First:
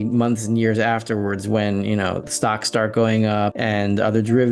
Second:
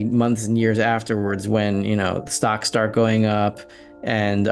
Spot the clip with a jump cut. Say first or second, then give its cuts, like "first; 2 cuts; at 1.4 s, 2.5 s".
first; 1 cut; at 3.6 s